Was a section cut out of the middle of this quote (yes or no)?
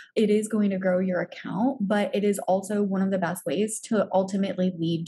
no